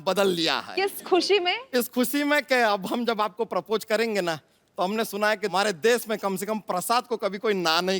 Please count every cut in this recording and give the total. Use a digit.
1